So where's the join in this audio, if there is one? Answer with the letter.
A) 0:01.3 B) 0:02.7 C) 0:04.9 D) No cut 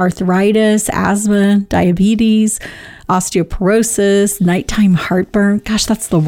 D